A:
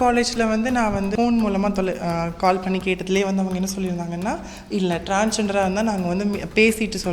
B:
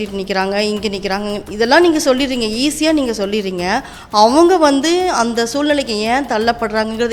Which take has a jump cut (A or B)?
A